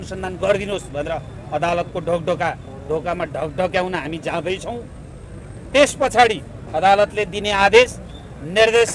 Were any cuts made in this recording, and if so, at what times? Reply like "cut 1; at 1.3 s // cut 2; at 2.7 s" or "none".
none